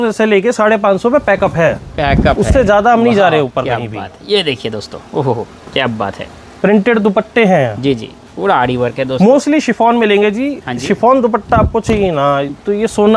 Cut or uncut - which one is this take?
uncut